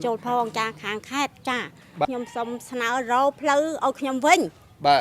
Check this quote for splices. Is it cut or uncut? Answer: cut